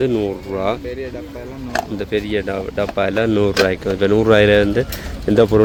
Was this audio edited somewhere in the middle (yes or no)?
no